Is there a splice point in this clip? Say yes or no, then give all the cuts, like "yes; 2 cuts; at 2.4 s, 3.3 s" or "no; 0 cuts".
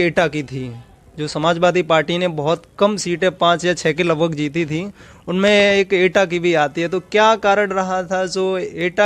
no; 0 cuts